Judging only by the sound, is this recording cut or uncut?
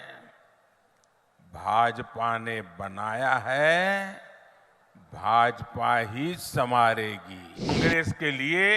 cut